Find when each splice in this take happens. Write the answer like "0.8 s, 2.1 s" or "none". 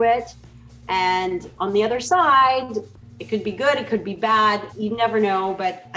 4.7 s